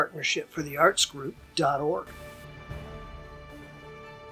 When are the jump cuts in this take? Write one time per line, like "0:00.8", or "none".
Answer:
none